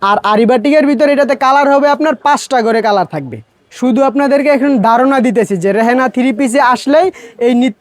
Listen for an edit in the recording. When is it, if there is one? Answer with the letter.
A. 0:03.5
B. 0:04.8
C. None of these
A